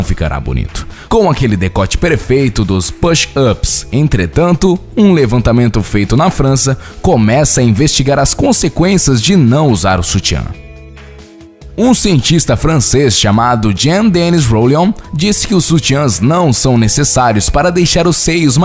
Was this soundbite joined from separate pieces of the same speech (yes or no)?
no